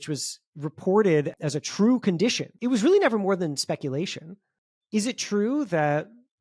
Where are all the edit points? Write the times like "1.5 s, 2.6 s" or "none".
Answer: 1.4 s, 2.5 s